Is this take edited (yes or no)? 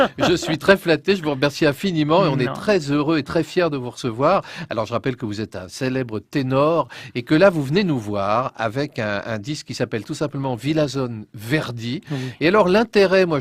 yes